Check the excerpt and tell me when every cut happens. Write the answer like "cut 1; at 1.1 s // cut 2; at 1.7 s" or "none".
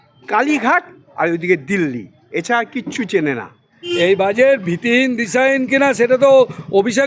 cut 1; at 3.8 s